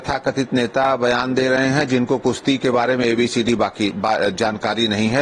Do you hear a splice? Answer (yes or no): no